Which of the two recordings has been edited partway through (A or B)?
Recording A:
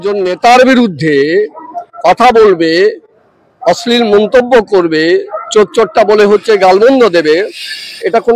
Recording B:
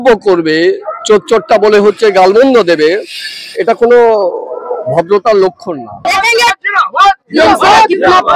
B